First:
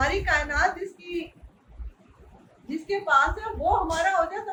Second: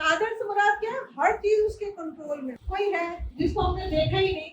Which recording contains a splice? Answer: second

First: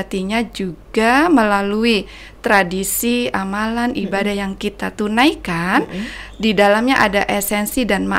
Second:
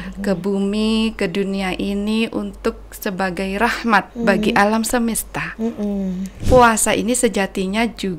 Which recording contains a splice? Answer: second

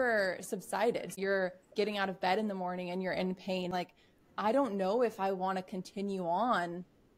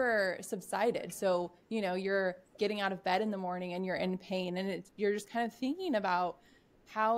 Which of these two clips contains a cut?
first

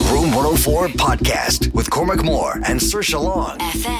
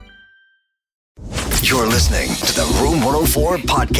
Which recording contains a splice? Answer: second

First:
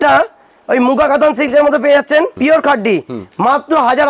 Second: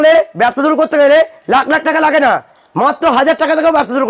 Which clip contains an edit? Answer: first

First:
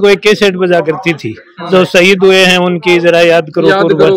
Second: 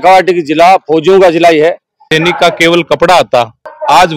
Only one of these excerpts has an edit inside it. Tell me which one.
second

